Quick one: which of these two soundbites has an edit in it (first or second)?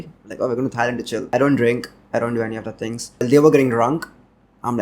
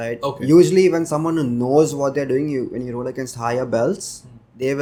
first